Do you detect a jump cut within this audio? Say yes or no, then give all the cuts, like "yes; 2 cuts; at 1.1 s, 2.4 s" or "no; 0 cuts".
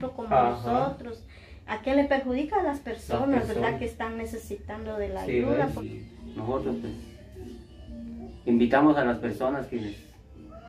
yes; 1 cut; at 5.8 s